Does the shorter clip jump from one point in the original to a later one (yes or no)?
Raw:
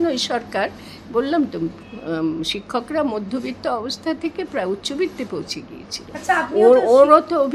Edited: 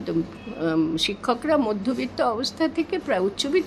no